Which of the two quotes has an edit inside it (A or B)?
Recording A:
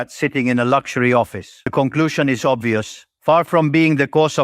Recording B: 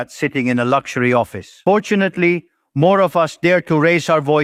A